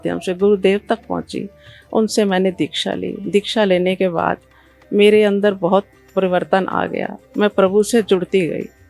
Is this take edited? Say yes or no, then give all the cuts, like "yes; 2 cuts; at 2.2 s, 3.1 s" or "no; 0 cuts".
no; 0 cuts